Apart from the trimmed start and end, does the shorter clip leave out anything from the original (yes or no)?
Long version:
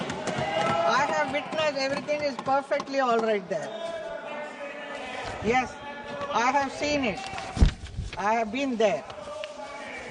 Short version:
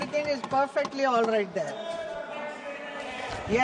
no